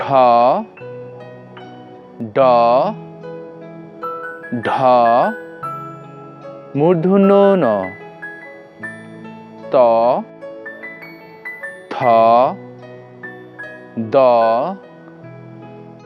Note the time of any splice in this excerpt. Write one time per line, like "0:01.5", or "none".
0:05.3
0:06.7